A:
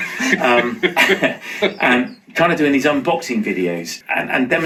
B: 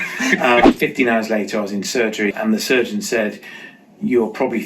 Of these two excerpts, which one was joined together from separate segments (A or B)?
B